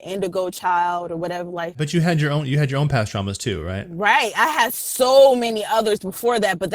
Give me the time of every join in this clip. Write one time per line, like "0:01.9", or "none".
0:01.8